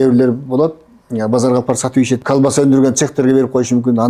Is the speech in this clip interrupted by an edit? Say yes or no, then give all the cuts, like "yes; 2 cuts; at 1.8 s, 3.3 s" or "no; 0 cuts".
yes; 1 cut; at 2.2 s